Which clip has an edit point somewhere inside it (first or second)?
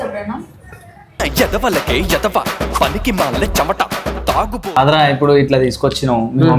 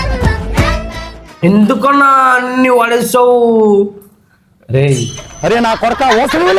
first